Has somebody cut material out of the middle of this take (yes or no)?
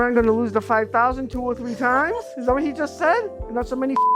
no